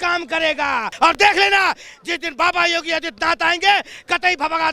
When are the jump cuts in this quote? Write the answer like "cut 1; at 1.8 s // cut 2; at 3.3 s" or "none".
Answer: cut 1; at 0.9 s